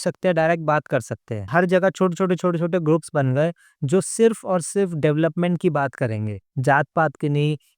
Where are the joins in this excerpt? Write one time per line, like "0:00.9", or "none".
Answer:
0:01.5